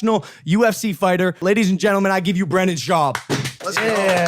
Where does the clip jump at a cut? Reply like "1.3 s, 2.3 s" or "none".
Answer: 1.4 s